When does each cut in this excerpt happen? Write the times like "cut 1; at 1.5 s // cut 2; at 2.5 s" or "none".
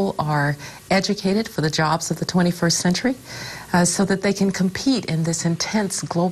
none